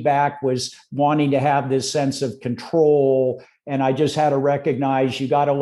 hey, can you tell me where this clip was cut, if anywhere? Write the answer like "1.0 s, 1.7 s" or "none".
none